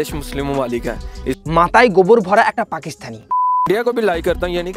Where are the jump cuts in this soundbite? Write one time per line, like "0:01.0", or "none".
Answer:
0:03.6